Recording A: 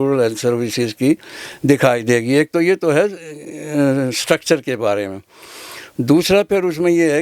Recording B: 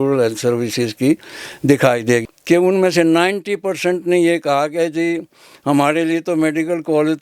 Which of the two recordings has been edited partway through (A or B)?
B